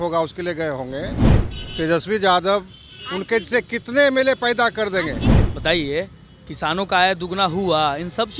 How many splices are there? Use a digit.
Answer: 1